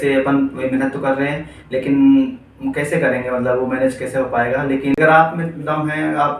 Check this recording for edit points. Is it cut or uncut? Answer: cut